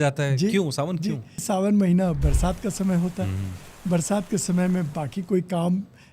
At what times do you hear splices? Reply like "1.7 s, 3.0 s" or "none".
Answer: 1.4 s

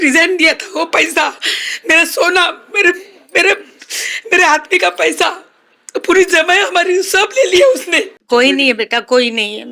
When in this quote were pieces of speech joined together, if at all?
8.1 s

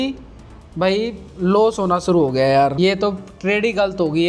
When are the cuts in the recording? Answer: 2.7 s

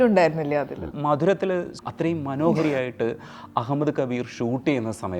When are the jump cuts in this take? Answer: 0.9 s, 1.7 s

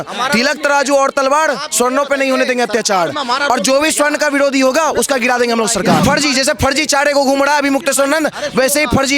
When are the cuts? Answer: 6.0 s

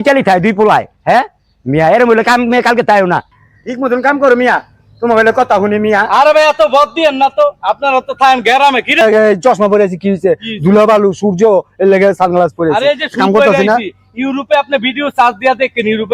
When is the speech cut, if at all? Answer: none

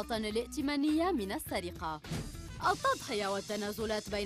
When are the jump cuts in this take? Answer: 2.4 s

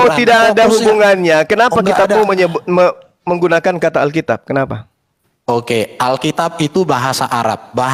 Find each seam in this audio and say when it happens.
none

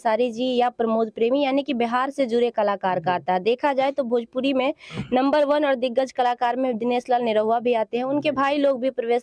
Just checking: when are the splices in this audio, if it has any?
none

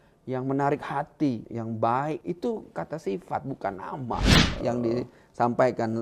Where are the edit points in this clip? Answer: 1.5 s, 2.2 s, 4.5 s

